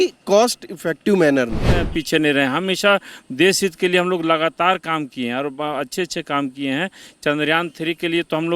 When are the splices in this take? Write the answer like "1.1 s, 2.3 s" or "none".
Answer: 1.8 s